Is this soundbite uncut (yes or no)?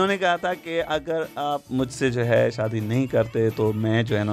yes